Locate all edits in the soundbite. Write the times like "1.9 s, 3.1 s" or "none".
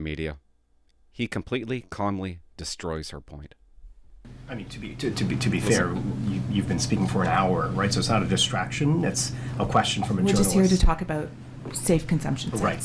4.2 s